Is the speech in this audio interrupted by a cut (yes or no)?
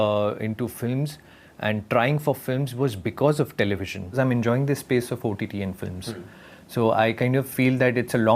yes